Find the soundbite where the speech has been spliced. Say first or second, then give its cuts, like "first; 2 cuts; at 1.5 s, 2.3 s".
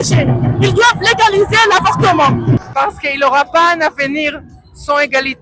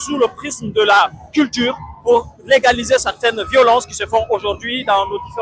first; 1 cut; at 2.6 s